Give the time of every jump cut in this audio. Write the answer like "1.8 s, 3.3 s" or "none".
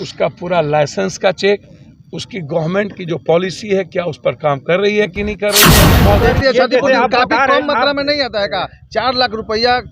5.7 s

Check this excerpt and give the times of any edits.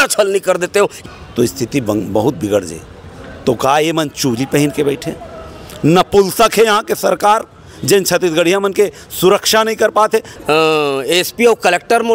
1.0 s, 10.3 s

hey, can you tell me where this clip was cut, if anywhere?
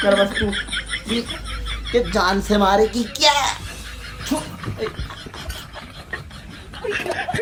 none

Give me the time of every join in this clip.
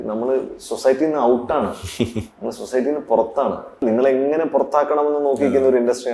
3.8 s

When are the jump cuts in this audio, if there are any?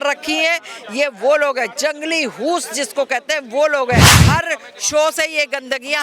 4.2 s

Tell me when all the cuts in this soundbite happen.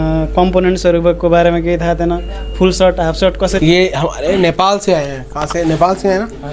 3.4 s

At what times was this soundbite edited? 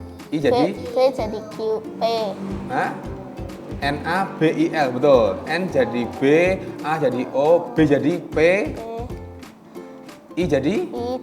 none

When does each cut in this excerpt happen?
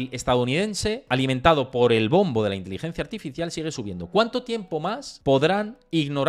1.0 s, 5.1 s

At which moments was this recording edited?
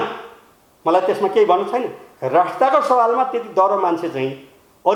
none

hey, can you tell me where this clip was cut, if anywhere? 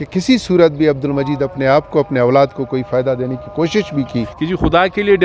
4.3 s

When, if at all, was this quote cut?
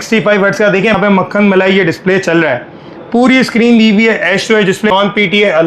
0.9 s, 4.9 s

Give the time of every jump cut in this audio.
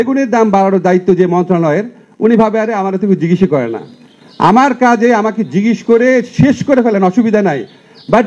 none

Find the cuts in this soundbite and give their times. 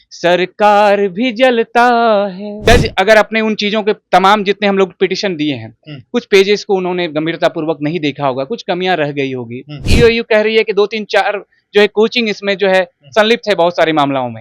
2.5 s, 9.9 s

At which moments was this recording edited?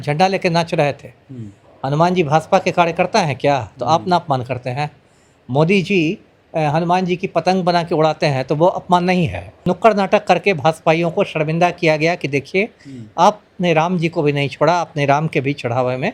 9.6 s

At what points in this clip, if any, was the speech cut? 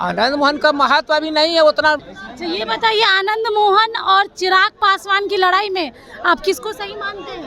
2.1 s

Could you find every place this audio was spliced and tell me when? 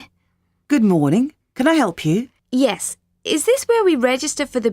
2.4 s

